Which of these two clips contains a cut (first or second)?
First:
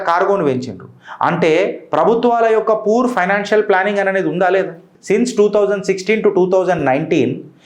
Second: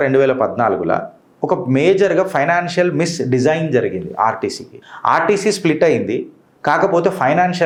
first